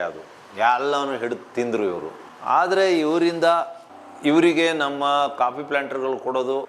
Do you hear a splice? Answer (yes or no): no